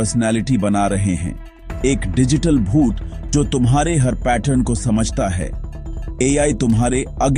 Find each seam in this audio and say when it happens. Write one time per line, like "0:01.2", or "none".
none